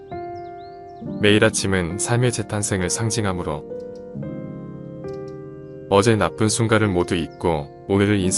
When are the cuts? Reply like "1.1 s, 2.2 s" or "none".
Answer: 4.1 s, 5.9 s